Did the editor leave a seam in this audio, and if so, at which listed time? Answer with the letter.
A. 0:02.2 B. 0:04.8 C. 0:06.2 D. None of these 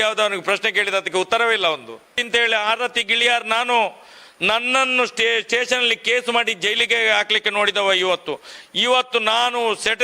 A